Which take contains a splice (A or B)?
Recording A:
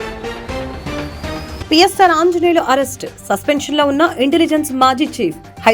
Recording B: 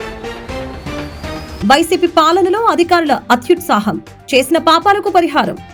A